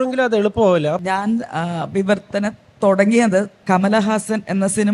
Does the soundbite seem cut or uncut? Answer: cut